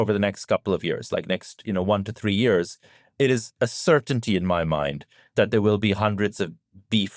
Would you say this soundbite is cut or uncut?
uncut